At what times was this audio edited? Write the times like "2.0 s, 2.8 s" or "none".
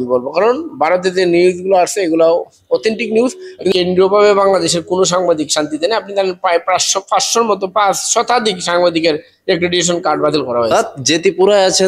3.7 s, 10.7 s